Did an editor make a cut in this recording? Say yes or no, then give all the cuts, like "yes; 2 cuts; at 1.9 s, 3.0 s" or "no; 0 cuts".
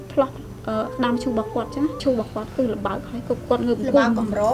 yes; 1 cut; at 2.0 s